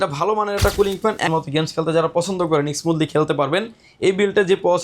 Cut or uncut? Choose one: cut